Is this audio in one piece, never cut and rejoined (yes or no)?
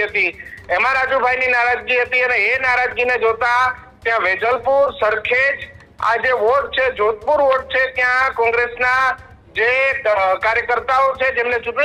yes